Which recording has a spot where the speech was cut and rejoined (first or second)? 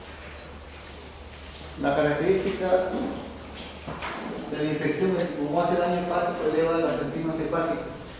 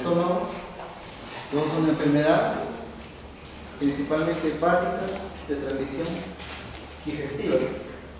second